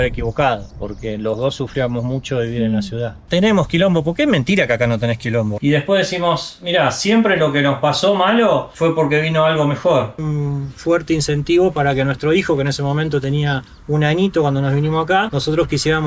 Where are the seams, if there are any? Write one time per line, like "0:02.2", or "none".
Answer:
0:03.2
0:05.5
0:10.3